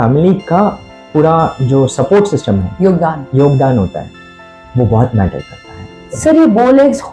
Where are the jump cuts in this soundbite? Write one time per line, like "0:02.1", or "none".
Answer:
0:06.0